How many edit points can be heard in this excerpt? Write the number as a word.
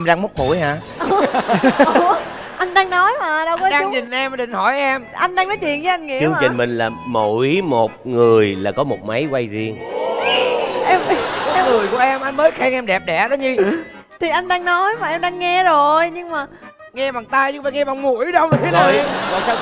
zero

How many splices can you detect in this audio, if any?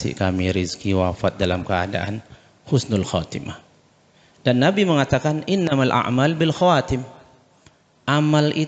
zero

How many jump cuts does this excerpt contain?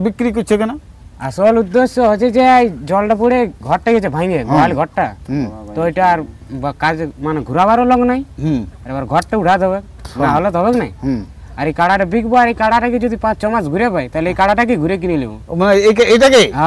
zero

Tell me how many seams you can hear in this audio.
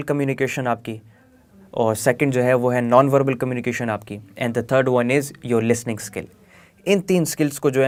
zero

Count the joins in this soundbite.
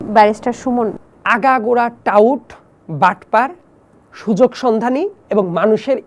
one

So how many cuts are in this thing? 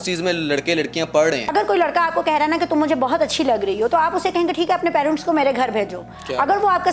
one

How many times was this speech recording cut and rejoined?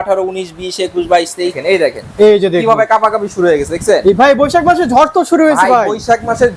one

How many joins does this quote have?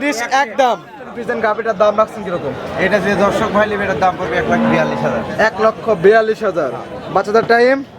one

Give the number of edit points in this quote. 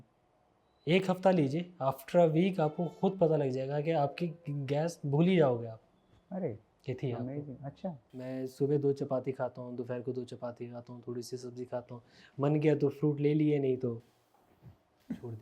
one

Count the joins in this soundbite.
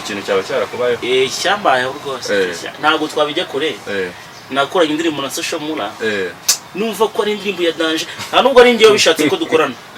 zero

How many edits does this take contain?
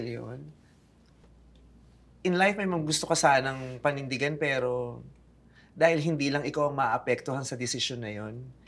one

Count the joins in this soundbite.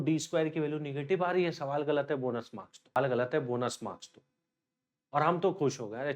one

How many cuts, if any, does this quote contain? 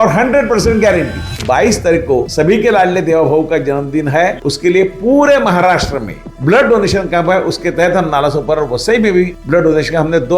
two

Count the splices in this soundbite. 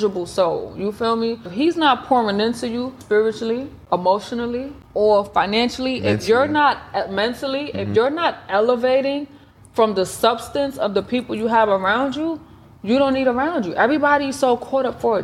four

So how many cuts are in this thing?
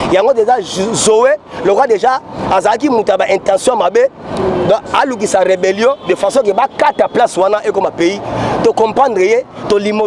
zero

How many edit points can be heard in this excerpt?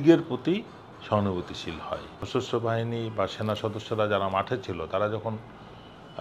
one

